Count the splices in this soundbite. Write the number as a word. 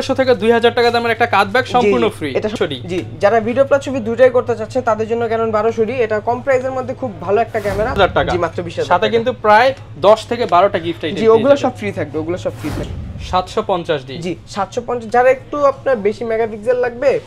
three